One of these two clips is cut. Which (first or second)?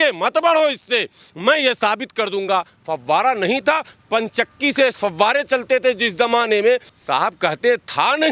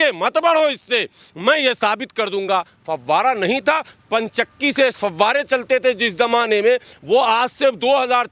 first